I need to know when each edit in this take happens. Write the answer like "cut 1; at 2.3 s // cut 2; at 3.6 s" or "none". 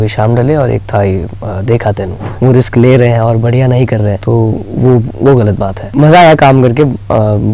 cut 1; at 2.2 s // cut 2; at 4.2 s // cut 3; at 5.8 s

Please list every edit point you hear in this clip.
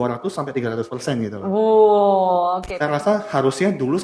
cut 1; at 2.7 s

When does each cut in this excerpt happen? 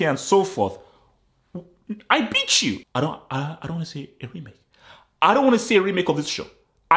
cut 1; at 2.8 s

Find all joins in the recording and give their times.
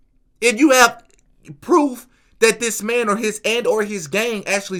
none

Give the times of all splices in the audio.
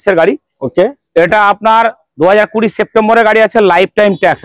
none

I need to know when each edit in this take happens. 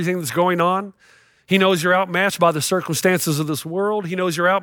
none

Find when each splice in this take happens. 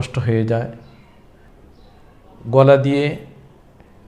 cut 1; at 1.5 s

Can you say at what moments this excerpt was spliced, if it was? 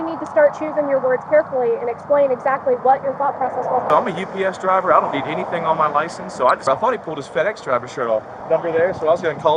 cut 1; at 3.9 s // cut 2; at 6.6 s // cut 3; at 8.3 s

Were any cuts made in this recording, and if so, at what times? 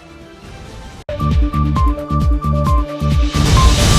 cut 1; at 1.0 s

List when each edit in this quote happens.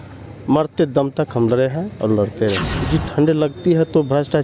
cut 1; at 2.7 s

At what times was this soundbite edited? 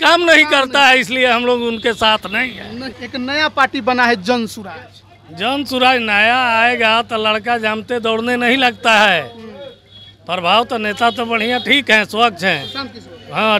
cut 1; at 2.9 s

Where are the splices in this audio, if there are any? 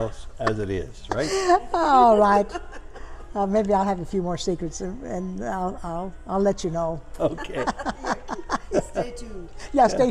none

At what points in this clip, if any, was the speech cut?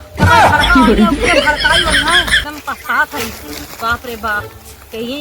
cut 1; at 2.4 s

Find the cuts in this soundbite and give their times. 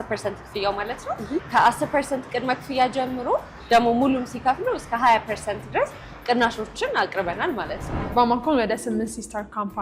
cut 1; at 1.5 s // cut 2; at 8.0 s

